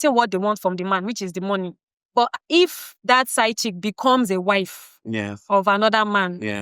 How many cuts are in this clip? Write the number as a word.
one